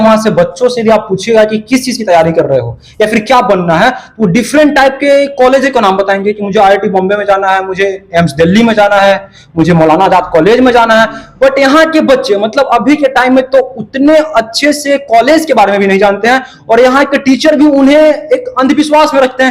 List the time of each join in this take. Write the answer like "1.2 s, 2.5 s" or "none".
none